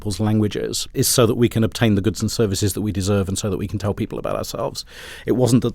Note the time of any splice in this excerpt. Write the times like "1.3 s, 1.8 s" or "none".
0.9 s